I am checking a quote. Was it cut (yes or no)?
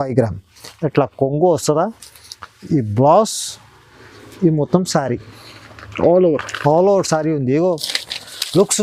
no